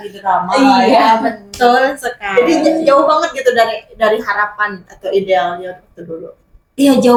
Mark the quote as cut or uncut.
uncut